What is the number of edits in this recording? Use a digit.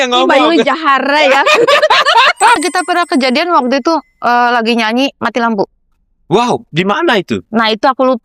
1